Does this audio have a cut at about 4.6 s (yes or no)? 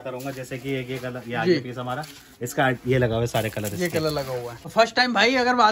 yes